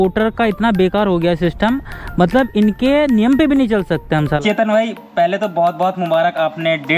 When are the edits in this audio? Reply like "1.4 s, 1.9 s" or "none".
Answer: 4.4 s